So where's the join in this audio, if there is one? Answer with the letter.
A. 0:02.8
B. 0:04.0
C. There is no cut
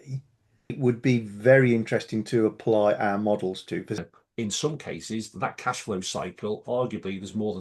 B